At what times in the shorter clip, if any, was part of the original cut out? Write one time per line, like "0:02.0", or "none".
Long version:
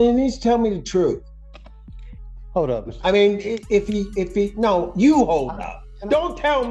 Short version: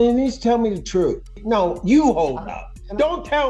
0:01.4